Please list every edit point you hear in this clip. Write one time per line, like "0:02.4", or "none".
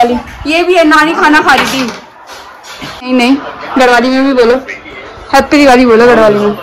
0:03.1